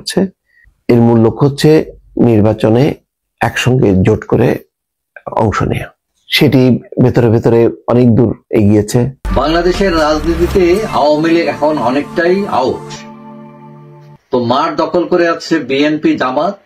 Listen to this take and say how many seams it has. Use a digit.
1